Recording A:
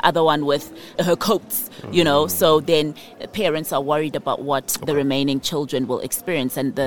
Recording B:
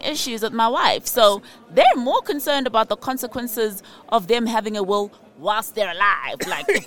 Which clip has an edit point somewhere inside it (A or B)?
A